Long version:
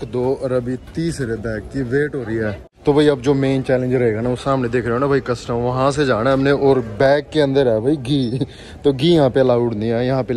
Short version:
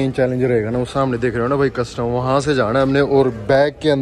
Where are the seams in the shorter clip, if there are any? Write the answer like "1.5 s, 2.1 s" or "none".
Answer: none